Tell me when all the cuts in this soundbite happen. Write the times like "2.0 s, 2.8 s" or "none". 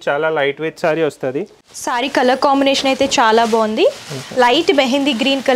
1.6 s